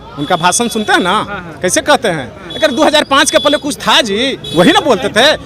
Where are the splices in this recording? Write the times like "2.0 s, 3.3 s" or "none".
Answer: 4.4 s